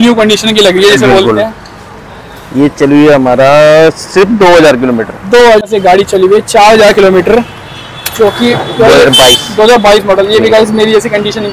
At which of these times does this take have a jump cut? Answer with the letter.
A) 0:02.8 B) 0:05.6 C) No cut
B